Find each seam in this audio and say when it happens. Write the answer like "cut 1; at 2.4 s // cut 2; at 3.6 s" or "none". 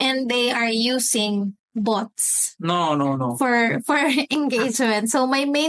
none